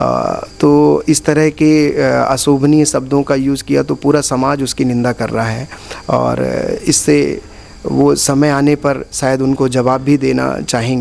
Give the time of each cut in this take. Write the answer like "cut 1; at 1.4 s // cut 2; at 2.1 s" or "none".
none